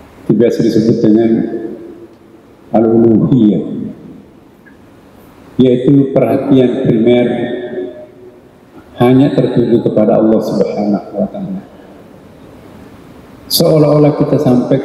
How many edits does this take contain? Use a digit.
1